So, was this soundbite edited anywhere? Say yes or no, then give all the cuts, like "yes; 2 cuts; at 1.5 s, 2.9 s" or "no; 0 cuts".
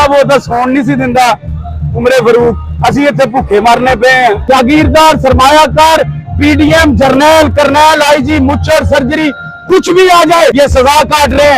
yes; 2 cuts; at 4.4 s, 10.5 s